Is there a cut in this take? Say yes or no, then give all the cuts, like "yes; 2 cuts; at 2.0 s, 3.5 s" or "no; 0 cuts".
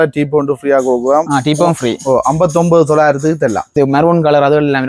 yes; 1 cut; at 3.7 s